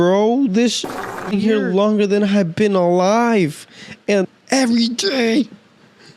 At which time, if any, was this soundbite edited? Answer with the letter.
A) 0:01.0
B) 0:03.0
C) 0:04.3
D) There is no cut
C